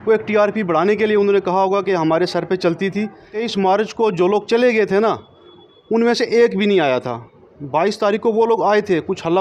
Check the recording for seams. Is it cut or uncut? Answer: cut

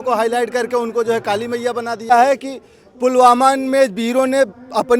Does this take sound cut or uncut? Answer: cut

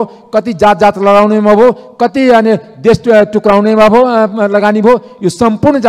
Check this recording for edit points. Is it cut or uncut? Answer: uncut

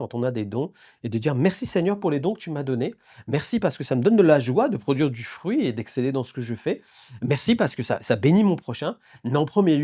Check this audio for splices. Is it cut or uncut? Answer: uncut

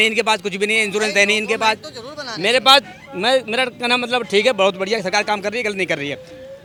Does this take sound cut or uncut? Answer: uncut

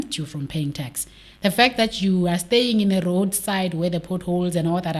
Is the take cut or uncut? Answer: uncut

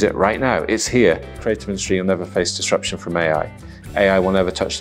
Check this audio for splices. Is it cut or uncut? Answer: cut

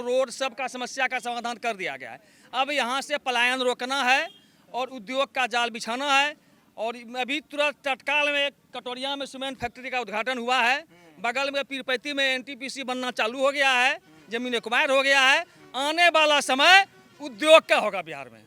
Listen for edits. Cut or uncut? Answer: uncut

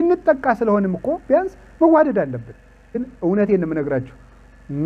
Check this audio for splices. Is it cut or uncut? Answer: cut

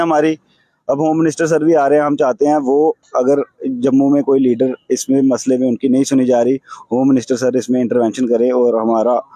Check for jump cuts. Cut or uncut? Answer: uncut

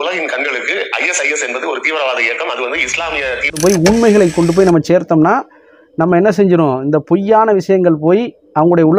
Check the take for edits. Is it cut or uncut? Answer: cut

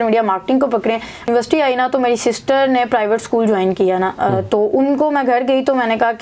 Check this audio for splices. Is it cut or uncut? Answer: cut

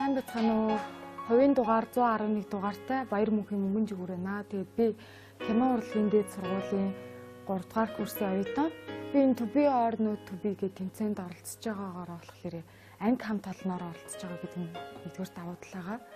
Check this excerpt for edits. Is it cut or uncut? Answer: uncut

